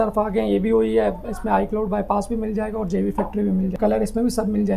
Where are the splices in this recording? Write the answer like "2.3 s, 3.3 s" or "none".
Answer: 3.8 s